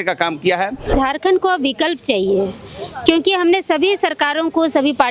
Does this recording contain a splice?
yes; 1 cut; at 0.9 s

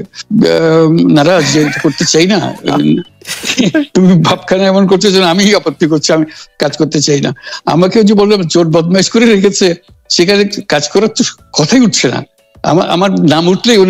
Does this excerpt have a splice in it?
no; 0 cuts

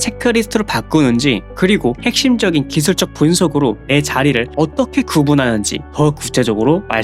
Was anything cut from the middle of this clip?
no; 0 cuts

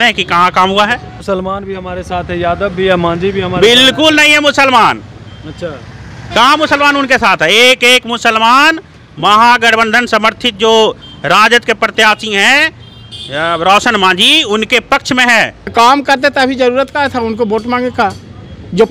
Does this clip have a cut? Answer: yes; 2 cuts; at 1.1 s, 15.7 s

